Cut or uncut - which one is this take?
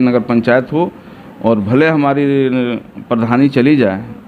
uncut